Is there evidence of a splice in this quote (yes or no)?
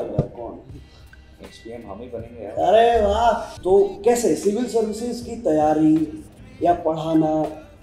yes